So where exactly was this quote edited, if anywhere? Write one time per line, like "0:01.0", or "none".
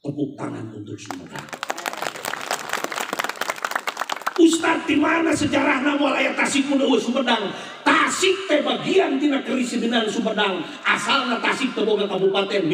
none